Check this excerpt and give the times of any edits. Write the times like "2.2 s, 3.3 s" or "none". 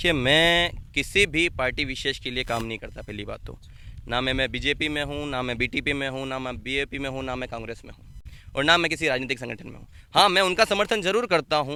none